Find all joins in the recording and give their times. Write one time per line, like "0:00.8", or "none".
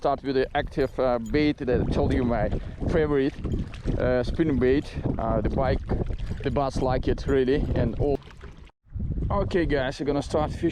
0:08.2